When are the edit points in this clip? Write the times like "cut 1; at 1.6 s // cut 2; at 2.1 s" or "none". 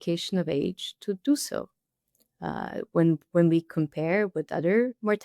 none